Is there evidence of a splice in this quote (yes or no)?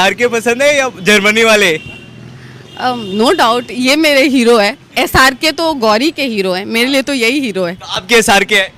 no